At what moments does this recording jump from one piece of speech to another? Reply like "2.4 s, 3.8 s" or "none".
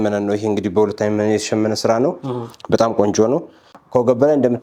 none